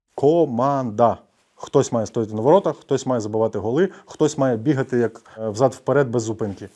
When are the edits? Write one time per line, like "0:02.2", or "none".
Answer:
0:05.5